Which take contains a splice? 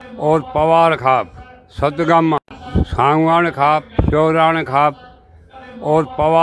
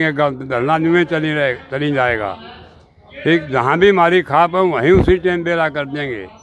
first; 1 cut; at 2.5 s

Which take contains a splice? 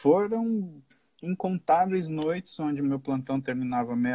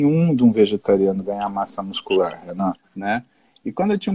second; 1 cut; at 2.9 s

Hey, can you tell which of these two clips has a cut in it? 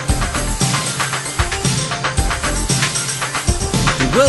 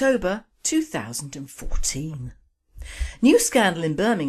second; 1 cut; at 1.2 s

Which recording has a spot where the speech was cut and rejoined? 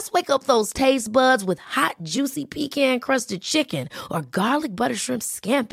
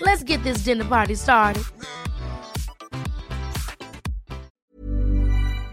second; 1 cut; at 4.6 s

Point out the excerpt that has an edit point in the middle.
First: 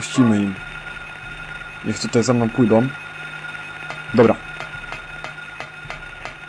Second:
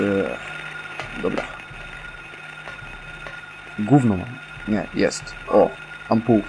second; 1 cut; at 3.6 s

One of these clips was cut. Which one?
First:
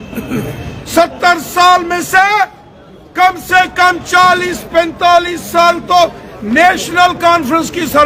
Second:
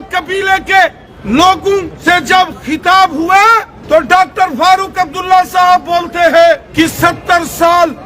second; 4 cuts; at 1.1 s, 1.9 s, 3.7 s, 6.7 s

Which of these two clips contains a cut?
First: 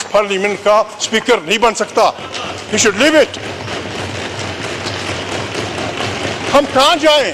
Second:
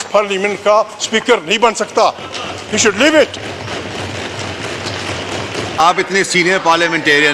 second; 1 cut; at 5.8 s

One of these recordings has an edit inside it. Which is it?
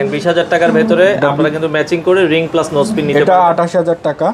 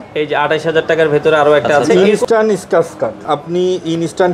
second; 2 cuts; at 1.9 s, 3.2 s

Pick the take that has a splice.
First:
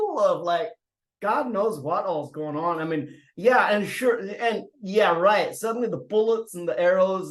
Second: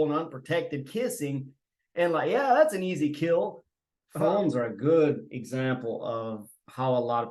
second; 1 cut; at 4.1 s

